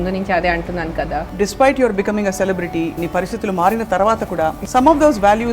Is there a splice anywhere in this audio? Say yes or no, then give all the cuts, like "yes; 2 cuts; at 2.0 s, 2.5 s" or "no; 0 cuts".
yes; 3 cuts; at 1.3 s, 3.0 s, 4.6 s